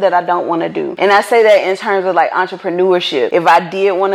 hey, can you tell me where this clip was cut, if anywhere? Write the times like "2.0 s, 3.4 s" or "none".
0.9 s, 3.3 s